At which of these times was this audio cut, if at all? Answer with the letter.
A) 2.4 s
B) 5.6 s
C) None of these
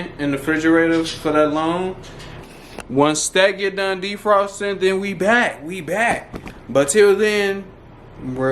A